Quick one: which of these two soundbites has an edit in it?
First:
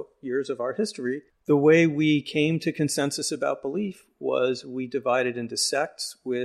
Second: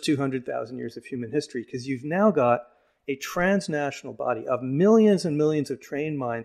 first; 1 cut; at 1.3 s

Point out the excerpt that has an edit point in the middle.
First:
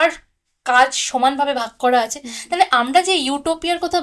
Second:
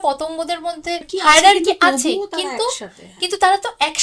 second; 1 cut; at 1.1 s

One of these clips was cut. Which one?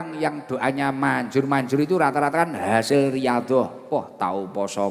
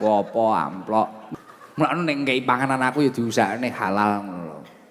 second; 1 cut; at 1.2 s

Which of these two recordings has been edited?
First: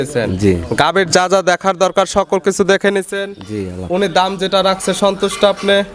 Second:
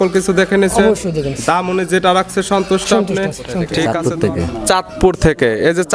second; 1 cut; at 3.7 s

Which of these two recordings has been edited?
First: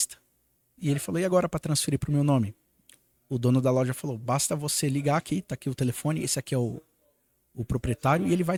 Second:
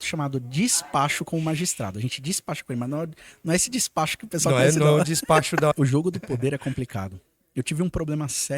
second; 1 cut; at 5.7 s

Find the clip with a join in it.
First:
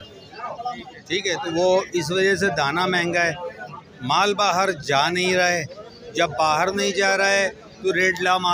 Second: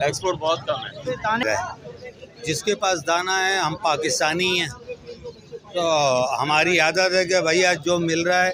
second; 1 cut; at 1.4 s

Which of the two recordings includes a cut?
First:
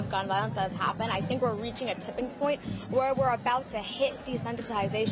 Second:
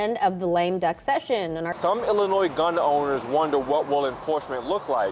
second; 1 cut; at 1.7 s

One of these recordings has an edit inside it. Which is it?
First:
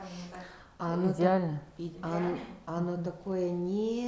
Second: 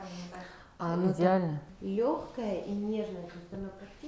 second; 1 cut; at 1.7 s

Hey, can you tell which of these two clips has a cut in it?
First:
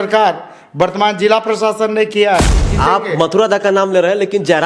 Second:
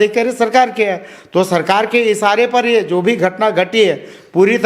first; 1 cut; at 2.6 s

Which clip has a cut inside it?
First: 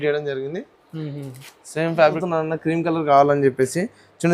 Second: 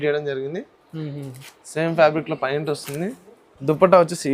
first; 1 cut; at 2.2 s

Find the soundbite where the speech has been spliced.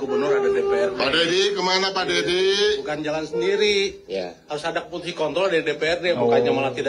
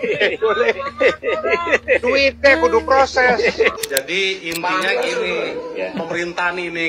second; 1 cut; at 3.7 s

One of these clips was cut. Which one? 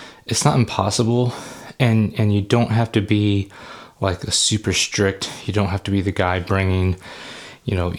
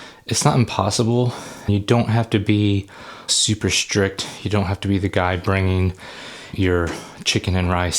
second; 3 cuts; at 1.7 s, 3.2 s, 6.5 s

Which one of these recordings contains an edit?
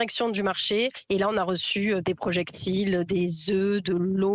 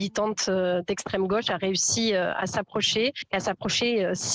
first; 1 cut; at 1.0 s

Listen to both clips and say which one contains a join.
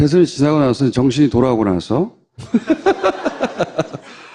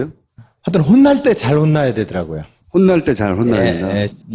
first; 1 cut; at 2.5 s

